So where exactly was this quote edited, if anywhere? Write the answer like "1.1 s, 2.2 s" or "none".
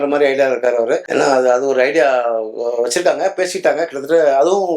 none

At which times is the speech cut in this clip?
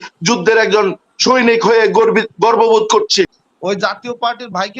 3.2 s

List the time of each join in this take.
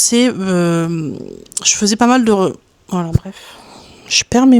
none

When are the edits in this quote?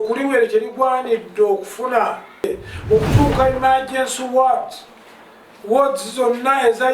2.5 s

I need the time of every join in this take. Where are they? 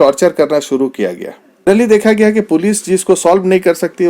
1.7 s

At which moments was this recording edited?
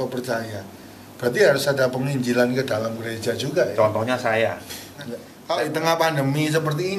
5.3 s

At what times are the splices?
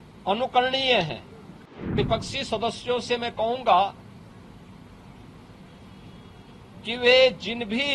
1.9 s

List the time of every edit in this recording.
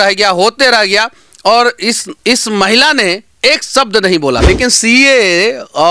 2.1 s, 4.4 s

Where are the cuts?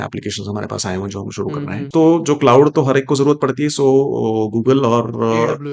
1.8 s

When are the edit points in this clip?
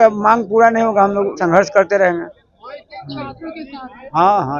none

